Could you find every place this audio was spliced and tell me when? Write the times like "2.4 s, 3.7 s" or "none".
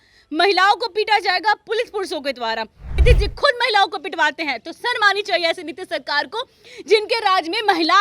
3.0 s